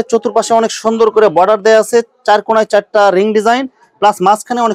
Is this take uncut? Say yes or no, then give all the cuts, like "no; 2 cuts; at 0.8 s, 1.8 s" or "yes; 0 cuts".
yes; 0 cuts